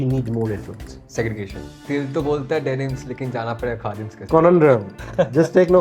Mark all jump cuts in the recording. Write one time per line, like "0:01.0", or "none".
0:01.7
0:04.1